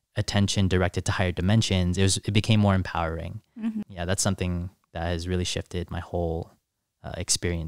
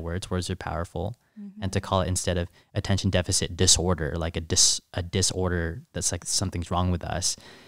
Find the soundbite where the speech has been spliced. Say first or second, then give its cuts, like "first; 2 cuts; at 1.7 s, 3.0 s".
first; 1 cut; at 3.9 s